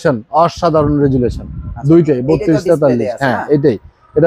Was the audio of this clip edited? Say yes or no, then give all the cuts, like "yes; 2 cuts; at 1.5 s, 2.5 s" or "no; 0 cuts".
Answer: no; 0 cuts